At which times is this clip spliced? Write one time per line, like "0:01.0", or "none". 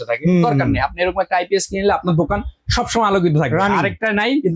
none